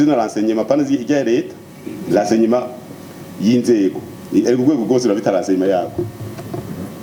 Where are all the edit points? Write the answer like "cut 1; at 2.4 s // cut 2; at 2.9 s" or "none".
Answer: none